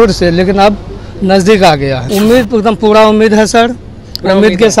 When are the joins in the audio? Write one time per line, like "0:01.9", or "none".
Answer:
0:02.0